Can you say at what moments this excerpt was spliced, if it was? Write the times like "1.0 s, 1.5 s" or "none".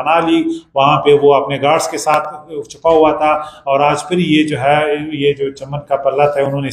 none